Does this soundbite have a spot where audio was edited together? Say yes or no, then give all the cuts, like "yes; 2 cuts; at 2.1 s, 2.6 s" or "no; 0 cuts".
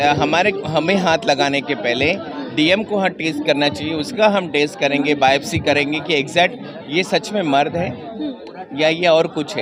no; 0 cuts